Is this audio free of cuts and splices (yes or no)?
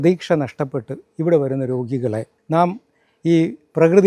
yes